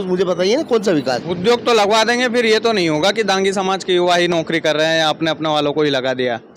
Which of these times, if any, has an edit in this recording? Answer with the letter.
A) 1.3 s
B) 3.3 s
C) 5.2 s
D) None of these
A